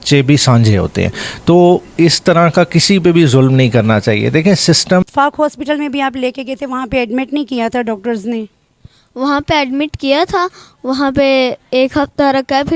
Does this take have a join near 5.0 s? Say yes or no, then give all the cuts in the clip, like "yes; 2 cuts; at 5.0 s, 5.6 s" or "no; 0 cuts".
yes; 1 cut; at 5.0 s